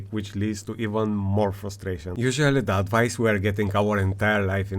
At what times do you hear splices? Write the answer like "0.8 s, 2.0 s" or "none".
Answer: 2.1 s